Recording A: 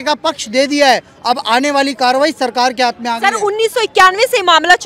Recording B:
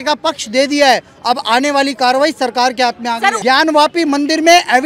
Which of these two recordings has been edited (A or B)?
B